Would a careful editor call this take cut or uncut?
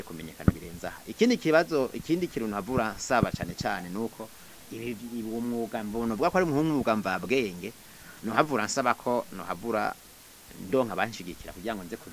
uncut